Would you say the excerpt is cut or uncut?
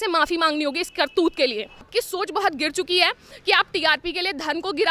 cut